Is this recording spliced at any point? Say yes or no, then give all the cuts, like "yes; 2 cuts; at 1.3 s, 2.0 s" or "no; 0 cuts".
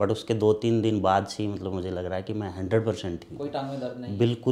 no; 0 cuts